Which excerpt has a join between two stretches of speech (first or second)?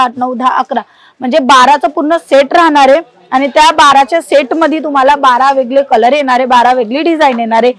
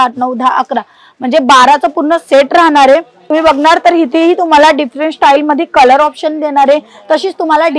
second